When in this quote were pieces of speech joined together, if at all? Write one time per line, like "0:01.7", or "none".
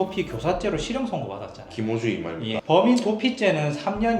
0:02.6